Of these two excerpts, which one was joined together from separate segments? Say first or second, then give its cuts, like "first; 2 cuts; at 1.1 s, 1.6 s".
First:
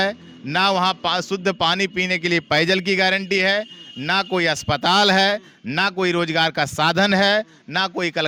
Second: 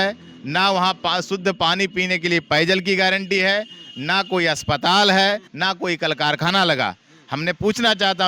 second; 1 cut; at 5.5 s